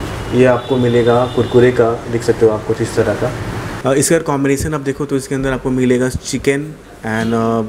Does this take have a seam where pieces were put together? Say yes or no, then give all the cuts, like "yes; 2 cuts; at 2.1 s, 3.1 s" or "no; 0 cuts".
yes; 1 cut; at 3.8 s